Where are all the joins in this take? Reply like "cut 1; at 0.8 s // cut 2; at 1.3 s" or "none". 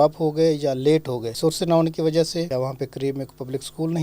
cut 1; at 1.3 s // cut 2; at 2.5 s